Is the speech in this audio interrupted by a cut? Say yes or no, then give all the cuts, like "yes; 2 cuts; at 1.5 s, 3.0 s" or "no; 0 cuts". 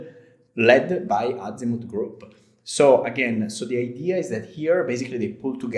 no; 0 cuts